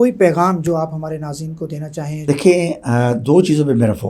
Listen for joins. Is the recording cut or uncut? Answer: cut